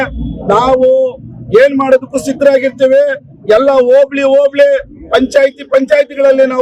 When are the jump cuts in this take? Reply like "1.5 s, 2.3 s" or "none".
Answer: none